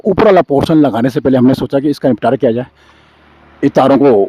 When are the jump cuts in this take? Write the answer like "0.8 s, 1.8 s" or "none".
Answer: none